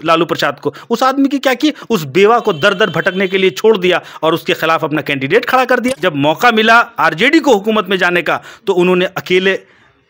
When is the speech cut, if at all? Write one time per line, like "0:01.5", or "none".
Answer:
0:06.0